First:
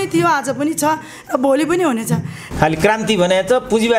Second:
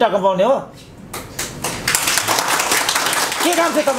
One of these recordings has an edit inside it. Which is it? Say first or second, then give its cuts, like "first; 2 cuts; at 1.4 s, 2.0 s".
first; 1 cut; at 2.4 s